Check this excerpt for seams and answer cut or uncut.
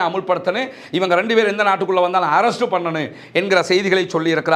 uncut